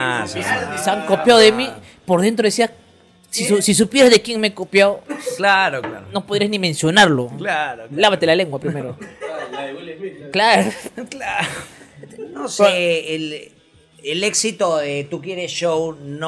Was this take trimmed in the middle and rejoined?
no; 0 cuts

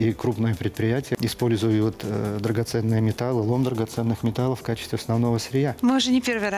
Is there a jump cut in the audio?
yes; 2 cuts; at 1.2 s, 5.8 s

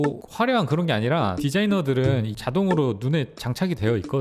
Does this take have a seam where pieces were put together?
yes; 2 cuts; at 1.4 s, 2.3 s

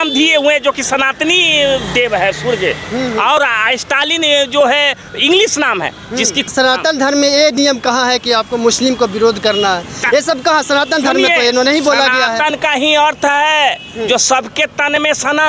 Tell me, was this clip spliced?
yes; 1 cut; at 6.5 s

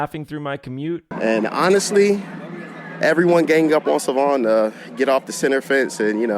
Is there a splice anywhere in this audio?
yes; 1 cut; at 1.1 s

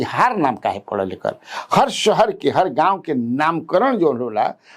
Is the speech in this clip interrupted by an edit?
no; 0 cuts

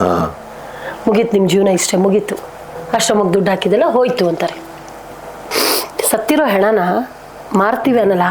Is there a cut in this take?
yes; 1 cut; at 5.4 s

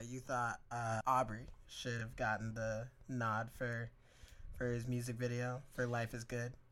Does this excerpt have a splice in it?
yes; 1 cut; at 1.0 s

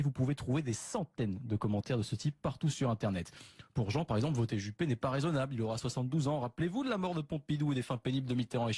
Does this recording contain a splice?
yes; 1 cut; at 2.2 s

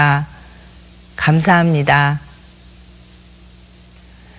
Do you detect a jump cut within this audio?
no; 0 cuts

